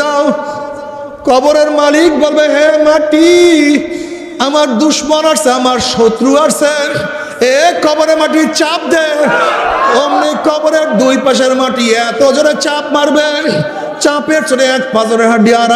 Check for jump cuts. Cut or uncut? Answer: uncut